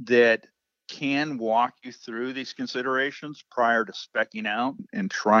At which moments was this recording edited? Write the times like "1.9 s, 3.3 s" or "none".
none